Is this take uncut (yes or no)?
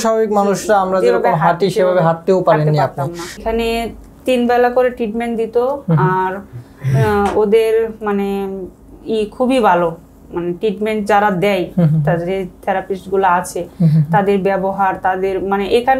no